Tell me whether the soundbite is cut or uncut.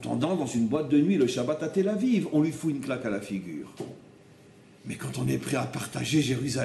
uncut